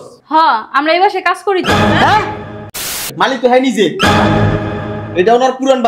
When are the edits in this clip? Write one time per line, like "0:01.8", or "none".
0:03.1